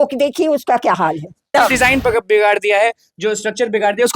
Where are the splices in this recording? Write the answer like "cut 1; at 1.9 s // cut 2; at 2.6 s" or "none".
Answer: cut 1; at 1.5 s